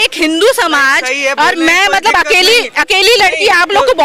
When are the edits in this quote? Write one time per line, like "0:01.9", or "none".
none